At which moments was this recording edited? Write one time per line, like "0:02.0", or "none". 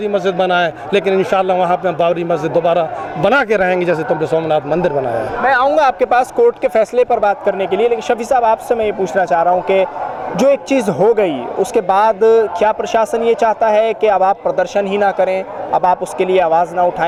none